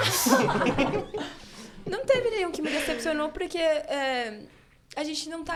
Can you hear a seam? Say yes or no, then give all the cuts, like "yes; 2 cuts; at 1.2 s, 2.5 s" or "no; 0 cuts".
no; 0 cuts